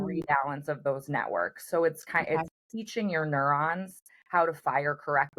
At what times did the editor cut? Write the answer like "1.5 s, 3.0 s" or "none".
none